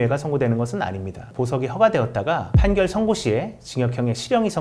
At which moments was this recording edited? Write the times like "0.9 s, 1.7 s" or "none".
1.3 s